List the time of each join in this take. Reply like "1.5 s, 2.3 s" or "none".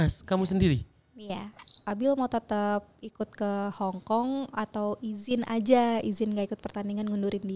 1.8 s